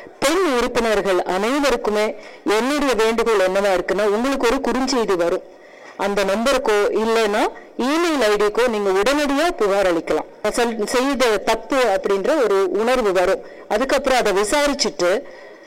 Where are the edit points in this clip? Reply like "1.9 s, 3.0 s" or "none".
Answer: 10.4 s